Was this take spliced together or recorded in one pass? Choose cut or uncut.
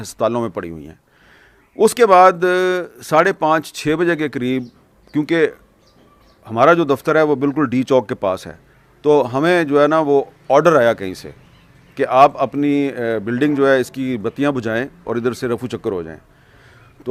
uncut